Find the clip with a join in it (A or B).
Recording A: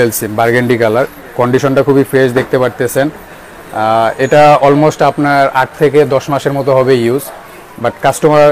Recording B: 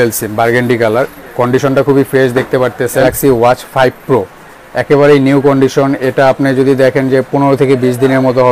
B